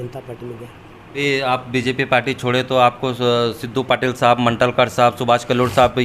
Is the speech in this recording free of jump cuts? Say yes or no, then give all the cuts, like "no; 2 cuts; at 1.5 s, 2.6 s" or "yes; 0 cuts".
no; 1 cut; at 1.1 s